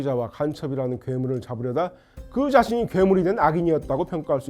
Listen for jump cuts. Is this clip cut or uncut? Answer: uncut